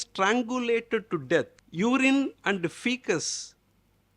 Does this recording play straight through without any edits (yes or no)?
no